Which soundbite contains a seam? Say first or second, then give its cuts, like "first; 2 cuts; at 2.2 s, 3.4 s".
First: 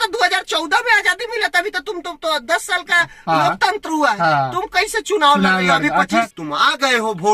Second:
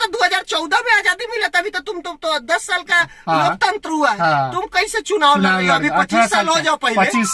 first; 1 cut; at 6.3 s